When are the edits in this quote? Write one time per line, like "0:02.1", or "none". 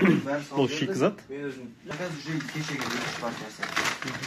0:01.8